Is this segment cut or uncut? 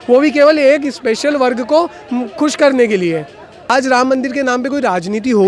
cut